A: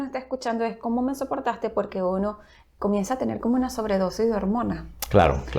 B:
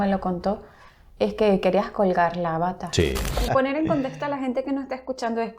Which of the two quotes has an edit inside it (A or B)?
B